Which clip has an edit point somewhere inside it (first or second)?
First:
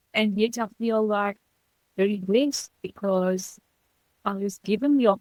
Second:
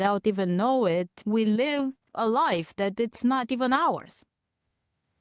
second